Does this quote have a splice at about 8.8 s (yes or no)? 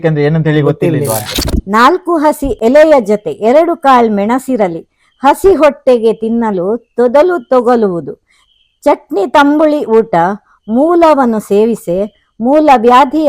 no